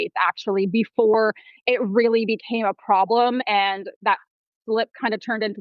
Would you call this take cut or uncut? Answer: uncut